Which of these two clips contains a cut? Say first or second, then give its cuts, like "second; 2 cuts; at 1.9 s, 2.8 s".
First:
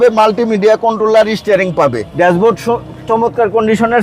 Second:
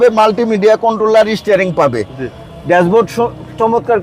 first; 1 cut; at 2.0 s